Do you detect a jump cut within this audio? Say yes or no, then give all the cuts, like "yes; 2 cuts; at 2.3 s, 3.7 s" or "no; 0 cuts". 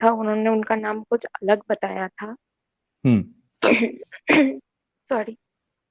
no; 0 cuts